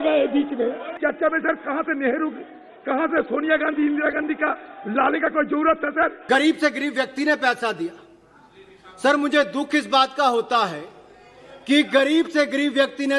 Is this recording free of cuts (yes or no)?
no